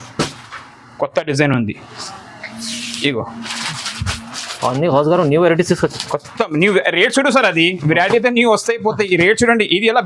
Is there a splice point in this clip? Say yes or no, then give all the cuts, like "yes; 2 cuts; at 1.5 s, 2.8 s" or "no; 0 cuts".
no; 0 cuts